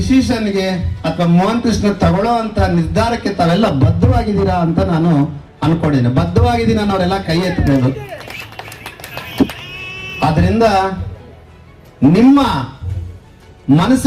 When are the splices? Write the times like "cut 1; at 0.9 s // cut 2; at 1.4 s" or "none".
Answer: none